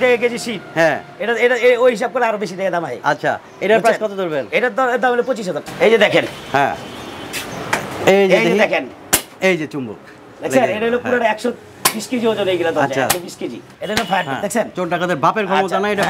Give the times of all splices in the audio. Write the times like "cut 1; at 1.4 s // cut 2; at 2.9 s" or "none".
cut 1; at 5.7 s // cut 2; at 13.7 s